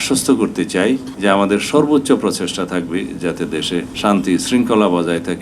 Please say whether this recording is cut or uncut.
cut